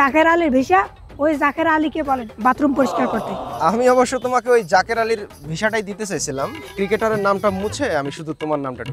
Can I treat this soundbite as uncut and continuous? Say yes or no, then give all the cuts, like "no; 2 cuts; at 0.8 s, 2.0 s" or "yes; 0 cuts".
no; 1 cut; at 6.6 s